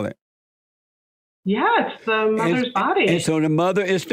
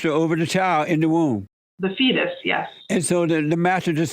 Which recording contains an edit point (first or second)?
second